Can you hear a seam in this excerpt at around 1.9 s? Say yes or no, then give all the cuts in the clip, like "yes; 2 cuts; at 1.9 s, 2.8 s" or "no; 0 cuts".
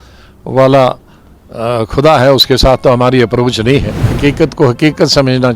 no; 1 cut; at 4.0 s